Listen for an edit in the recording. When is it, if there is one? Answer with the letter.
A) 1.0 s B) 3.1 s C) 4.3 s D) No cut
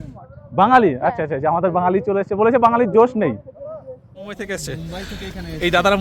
C